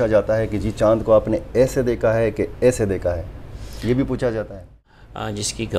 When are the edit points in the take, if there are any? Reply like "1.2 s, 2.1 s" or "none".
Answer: 4.8 s